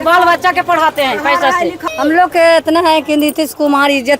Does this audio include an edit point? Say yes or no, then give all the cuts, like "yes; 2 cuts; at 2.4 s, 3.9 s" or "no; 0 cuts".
yes; 1 cut; at 1.8 s